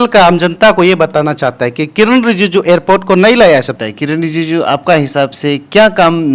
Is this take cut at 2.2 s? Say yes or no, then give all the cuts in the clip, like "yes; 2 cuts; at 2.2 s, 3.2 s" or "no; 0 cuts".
no; 1 cut; at 3.8 s